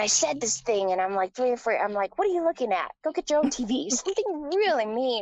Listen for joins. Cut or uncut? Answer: uncut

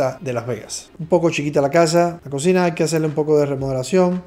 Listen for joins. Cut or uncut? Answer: cut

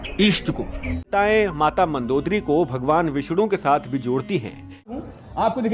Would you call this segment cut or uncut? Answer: cut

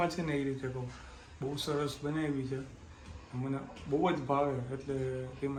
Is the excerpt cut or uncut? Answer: uncut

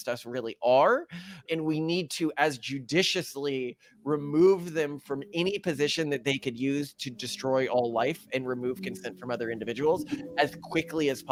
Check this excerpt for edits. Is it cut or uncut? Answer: uncut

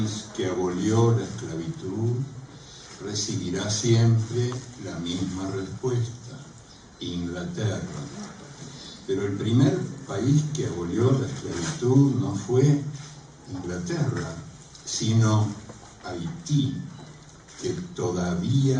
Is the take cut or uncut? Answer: cut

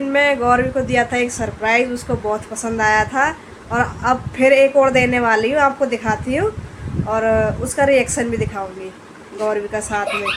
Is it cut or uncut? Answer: uncut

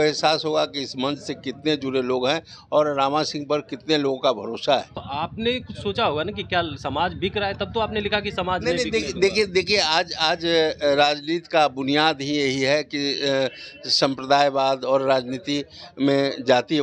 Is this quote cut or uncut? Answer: cut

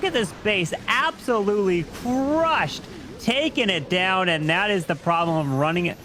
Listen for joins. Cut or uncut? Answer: uncut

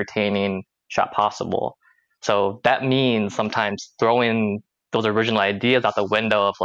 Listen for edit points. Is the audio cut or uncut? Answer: uncut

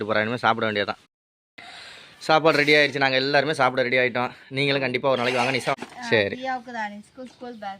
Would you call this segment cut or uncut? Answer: cut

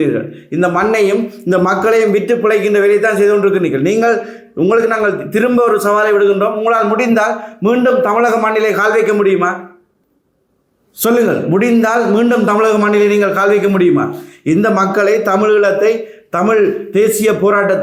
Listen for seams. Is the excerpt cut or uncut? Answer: uncut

